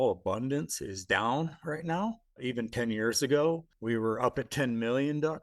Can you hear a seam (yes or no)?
yes